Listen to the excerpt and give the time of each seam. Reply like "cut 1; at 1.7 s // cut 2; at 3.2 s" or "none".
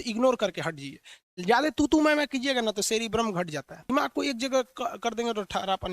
cut 1; at 3.8 s